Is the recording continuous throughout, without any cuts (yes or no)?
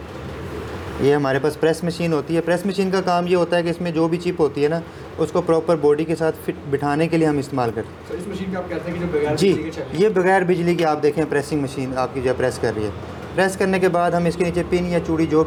yes